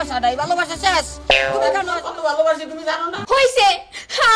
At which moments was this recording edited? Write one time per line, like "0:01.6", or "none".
0:01.9